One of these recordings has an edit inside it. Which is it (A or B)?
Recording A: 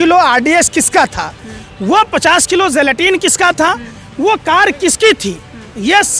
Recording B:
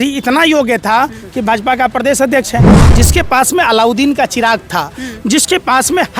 B